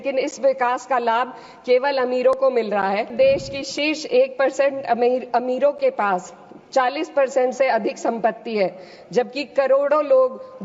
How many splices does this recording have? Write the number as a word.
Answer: one